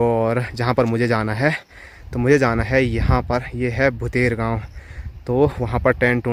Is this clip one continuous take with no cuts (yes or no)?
yes